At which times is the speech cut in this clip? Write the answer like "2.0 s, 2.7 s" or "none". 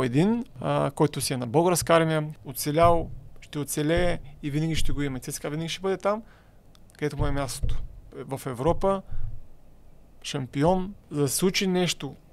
2.3 s, 8.1 s, 11.0 s

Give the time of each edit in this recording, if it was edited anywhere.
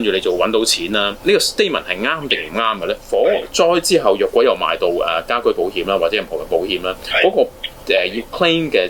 3.0 s

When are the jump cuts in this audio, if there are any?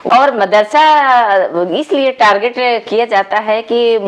none

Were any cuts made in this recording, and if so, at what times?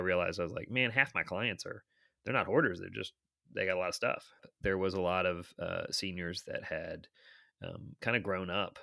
4.4 s

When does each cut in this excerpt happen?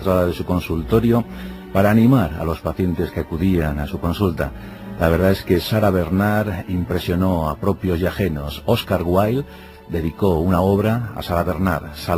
7.8 s

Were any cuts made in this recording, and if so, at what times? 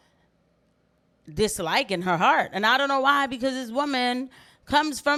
none

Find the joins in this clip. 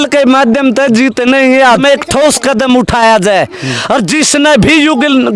1.8 s

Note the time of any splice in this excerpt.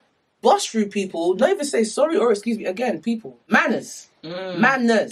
3.3 s

